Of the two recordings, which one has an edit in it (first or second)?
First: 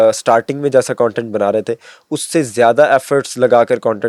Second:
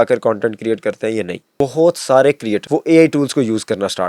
second